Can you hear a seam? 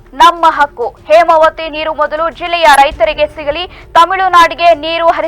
no; 0 cuts

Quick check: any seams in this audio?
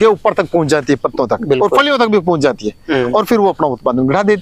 no; 0 cuts

